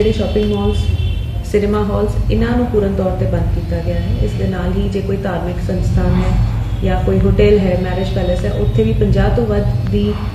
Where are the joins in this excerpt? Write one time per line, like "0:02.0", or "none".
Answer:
none